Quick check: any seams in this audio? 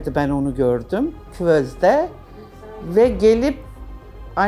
yes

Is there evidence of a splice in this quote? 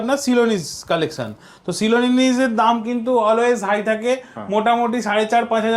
no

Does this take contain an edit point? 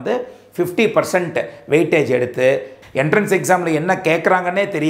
yes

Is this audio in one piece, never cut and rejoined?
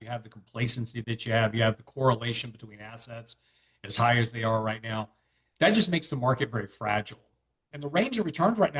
no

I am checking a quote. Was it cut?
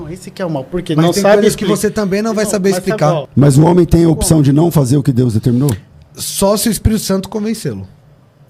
yes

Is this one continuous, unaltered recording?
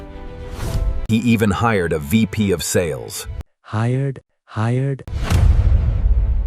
yes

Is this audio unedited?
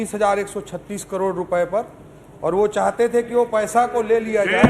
yes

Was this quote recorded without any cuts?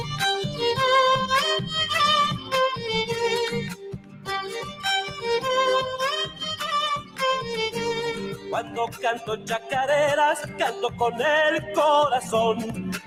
yes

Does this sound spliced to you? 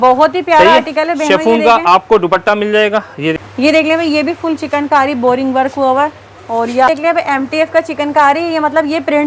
yes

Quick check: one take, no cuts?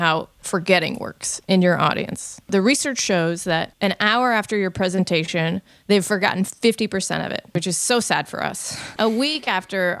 no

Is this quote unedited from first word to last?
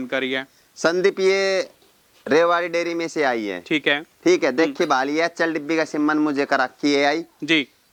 yes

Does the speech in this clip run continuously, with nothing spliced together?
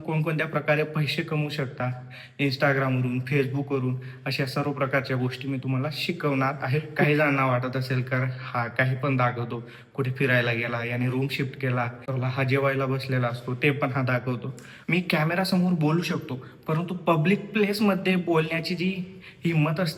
no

